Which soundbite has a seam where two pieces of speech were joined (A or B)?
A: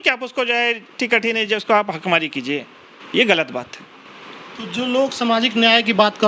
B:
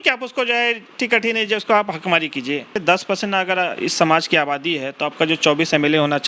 B